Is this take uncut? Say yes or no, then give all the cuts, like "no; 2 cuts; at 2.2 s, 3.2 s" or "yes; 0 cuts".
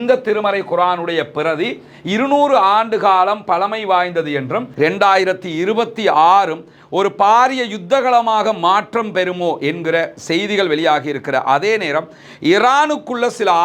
no; 1 cut; at 4.7 s